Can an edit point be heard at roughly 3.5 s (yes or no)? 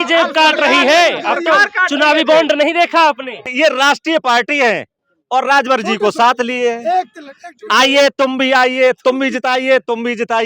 yes